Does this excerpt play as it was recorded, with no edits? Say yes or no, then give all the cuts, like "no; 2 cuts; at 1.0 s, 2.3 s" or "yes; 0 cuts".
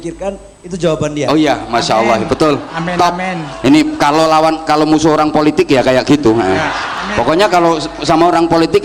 yes; 0 cuts